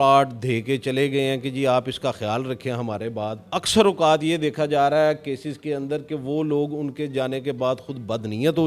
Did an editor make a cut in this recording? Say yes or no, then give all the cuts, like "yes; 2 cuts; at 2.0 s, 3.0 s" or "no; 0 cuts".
yes; 1 cut; at 3.5 s